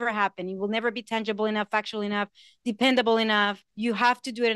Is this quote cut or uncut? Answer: cut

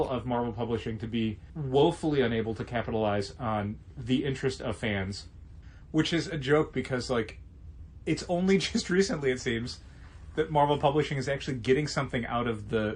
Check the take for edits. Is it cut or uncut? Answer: uncut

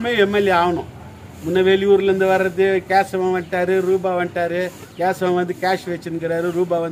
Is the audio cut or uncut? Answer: uncut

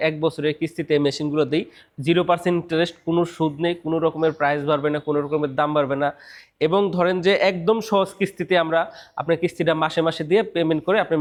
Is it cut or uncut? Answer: uncut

